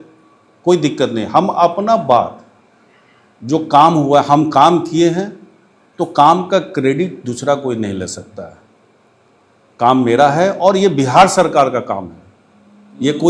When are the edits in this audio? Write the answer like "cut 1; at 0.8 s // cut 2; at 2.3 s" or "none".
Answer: none